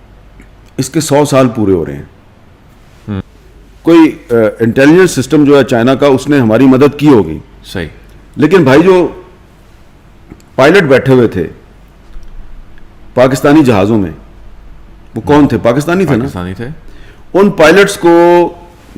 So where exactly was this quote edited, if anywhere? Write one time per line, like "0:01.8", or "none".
0:03.2